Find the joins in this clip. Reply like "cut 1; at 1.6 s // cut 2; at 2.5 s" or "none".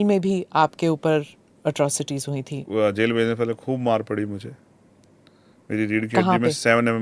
cut 1; at 2.6 s